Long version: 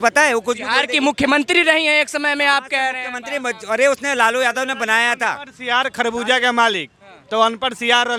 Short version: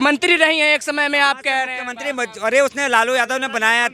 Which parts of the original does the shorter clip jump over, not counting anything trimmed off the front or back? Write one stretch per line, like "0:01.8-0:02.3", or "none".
none